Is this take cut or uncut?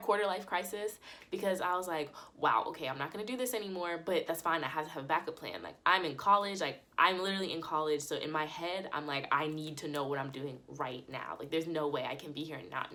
uncut